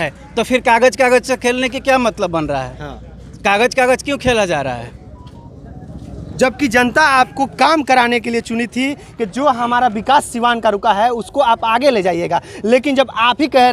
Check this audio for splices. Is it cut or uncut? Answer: uncut